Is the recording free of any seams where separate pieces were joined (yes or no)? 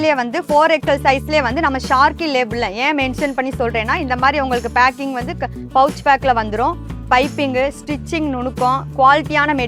yes